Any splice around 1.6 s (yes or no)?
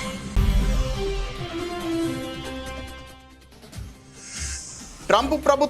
no